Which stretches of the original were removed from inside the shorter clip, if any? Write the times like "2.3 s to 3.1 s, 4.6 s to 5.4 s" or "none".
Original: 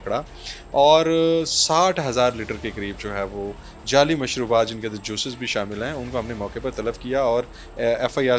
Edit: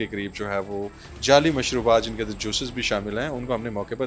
none